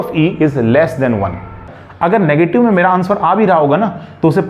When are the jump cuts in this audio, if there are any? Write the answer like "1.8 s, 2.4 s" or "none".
1.7 s